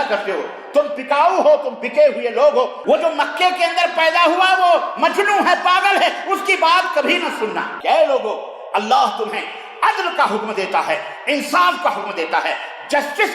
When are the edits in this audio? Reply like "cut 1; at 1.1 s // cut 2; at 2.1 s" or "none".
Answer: cut 1; at 2.8 s // cut 2; at 7.7 s